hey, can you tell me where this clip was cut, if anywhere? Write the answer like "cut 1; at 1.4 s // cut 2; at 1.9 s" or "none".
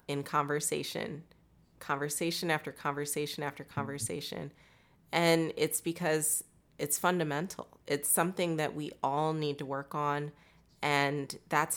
none